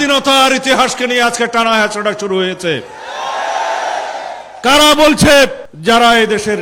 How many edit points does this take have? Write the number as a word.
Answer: zero